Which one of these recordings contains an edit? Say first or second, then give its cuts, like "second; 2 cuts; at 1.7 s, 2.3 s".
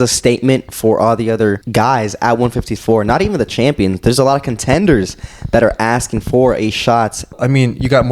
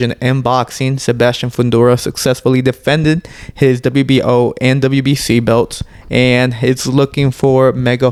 first; 2 cuts; at 1.6 s, 7.3 s